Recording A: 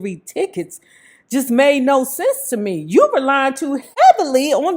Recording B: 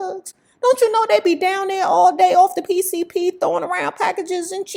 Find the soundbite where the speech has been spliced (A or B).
A